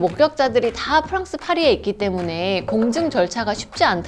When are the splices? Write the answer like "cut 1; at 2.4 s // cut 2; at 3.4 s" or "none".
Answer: none